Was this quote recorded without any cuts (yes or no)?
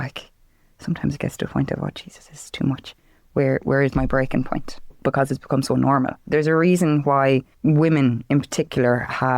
no